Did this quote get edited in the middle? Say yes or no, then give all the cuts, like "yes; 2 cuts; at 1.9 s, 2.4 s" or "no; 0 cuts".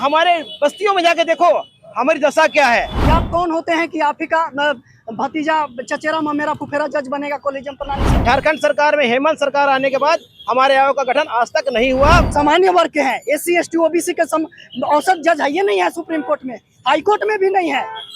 yes; 3 cuts; at 2.9 s, 8.0 s, 12.3 s